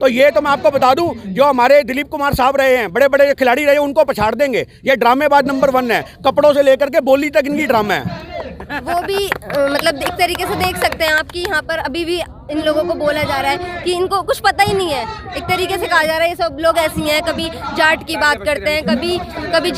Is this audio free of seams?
yes; 0 cuts

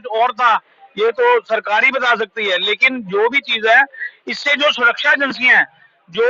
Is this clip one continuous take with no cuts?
yes; 0 cuts

